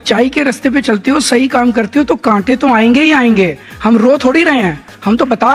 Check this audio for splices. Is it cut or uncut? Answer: uncut